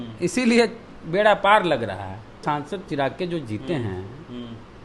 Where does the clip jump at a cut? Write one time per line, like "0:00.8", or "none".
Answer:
0:02.4